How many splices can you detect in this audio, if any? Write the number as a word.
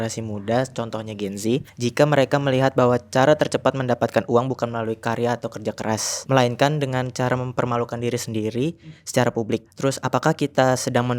three